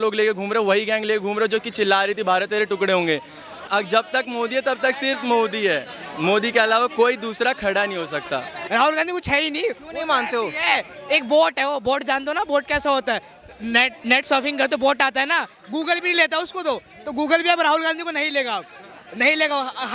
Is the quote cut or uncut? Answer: cut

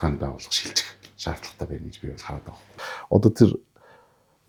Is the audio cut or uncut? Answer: uncut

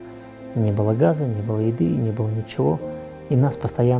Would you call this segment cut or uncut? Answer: uncut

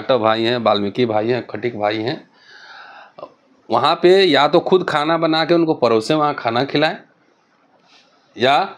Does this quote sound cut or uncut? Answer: uncut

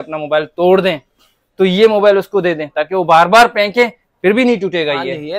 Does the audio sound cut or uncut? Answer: uncut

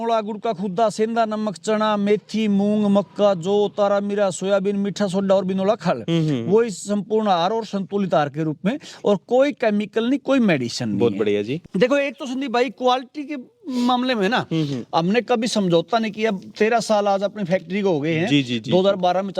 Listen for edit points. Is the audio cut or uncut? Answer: cut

